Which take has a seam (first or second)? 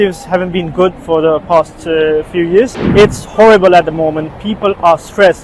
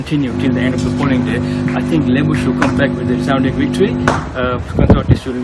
first